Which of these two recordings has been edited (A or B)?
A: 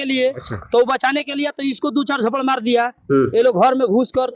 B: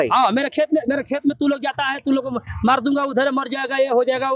A